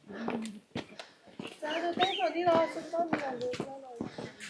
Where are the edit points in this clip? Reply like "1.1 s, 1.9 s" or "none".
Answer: none